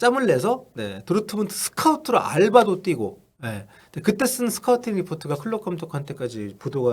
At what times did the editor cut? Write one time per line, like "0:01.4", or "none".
none

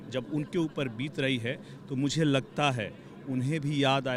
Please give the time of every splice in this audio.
none

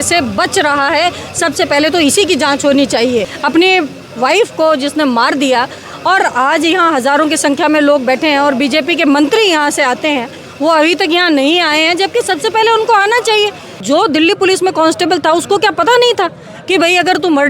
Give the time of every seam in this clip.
0:03.3
0:13.8

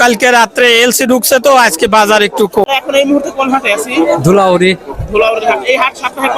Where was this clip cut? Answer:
0:02.6

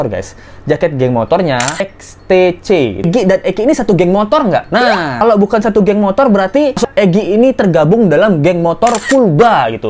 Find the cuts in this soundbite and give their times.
0:01.9
0:03.1
0:06.9

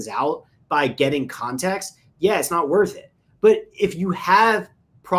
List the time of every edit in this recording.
none

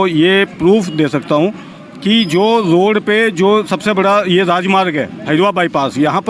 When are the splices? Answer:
none

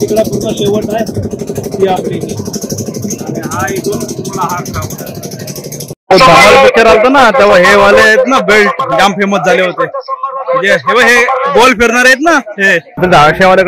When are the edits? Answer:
0:06.0
0:12.9

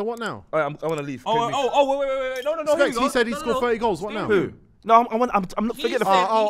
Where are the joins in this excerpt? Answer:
none

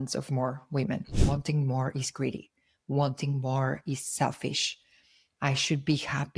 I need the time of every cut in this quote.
0:01.1

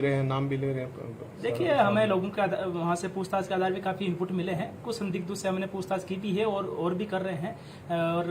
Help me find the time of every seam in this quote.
0:06.6

